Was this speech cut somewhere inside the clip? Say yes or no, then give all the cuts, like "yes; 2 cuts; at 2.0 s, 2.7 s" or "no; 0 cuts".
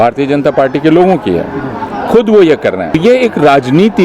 yes; 1 cut; at 3.0 s